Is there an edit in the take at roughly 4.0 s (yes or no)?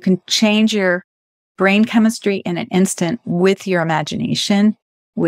no